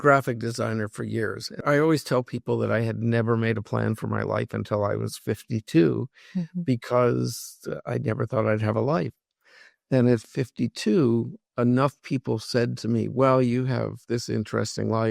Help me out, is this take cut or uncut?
cut